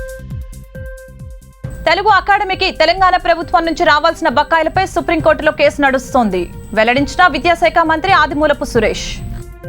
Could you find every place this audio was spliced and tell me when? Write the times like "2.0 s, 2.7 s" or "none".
1.0 s